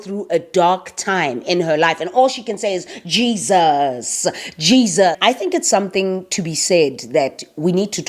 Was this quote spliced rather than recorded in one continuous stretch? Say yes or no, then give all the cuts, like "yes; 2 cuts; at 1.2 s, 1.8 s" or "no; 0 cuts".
yes; 1 cut; at 5.2 s